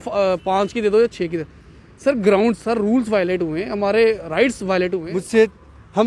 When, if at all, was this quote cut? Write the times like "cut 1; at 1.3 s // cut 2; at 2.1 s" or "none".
cut 1; at 5.1 s